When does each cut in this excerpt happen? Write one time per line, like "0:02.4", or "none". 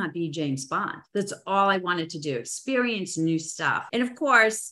0:01.0